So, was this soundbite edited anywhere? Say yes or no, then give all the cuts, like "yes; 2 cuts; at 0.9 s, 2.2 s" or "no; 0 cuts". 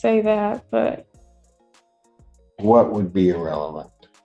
no; 0 cuts